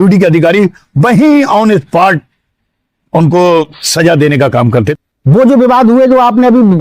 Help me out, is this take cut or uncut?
cut